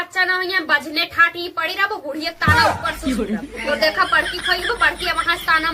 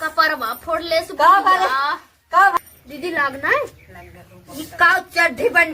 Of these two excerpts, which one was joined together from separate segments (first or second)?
second